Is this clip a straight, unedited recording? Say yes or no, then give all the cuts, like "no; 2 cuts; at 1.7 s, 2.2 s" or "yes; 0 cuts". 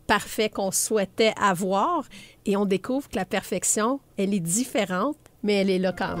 no; 2 cuts; at 4.1 s, 5.3 s